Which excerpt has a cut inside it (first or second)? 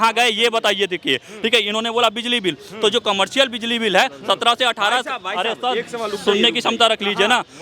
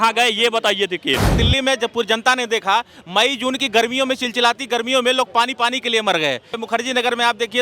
second